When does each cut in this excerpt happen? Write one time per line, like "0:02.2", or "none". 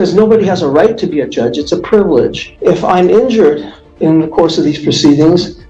0:02.5